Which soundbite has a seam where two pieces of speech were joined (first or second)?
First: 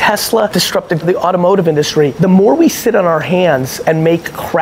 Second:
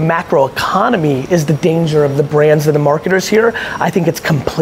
first